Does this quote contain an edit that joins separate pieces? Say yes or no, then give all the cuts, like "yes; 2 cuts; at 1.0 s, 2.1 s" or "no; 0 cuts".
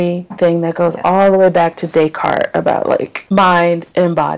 yes; 1 cut; at 3.2 s